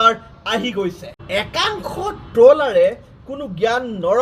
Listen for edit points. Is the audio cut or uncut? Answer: cut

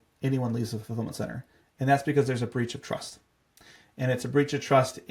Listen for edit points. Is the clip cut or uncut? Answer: uncut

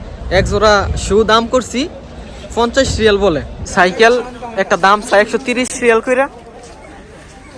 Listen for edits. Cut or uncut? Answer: cut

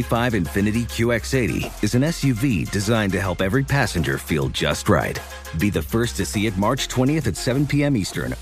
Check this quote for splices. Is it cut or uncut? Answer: uncut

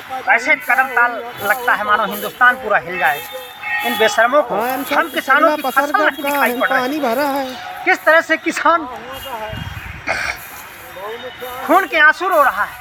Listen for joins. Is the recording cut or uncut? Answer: uncut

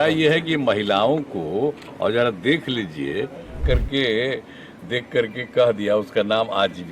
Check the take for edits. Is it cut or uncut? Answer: cut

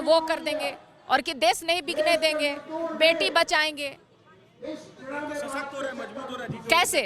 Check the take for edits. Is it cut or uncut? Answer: uncut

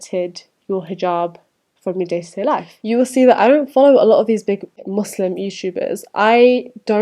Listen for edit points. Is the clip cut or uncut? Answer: cut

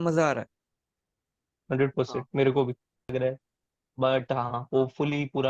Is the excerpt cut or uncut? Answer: cut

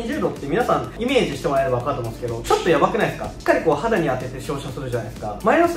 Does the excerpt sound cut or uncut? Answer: uncut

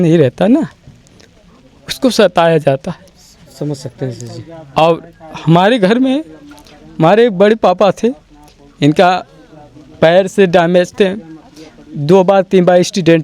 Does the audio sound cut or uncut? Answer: uncut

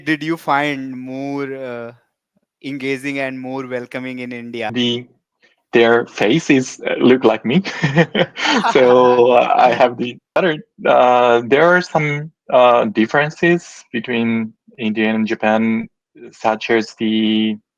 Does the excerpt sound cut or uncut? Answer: cut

